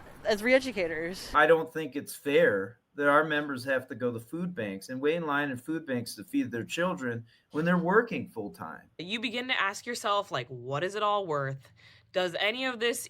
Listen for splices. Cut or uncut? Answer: cut